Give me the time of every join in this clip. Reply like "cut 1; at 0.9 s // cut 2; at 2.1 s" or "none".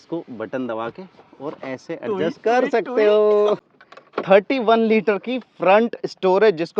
cut 1; at 3.6 s